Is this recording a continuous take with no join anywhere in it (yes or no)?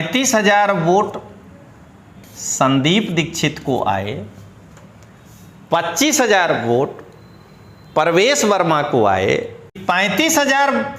no